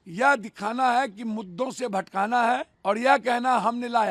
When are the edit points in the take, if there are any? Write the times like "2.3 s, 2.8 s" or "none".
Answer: 2.7 s